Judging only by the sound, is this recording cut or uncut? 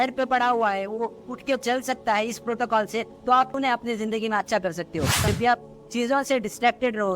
cut